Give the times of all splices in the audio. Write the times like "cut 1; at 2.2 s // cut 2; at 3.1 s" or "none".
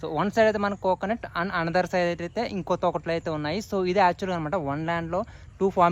none